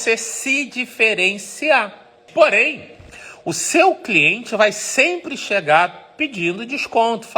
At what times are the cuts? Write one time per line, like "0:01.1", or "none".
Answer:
0:02.2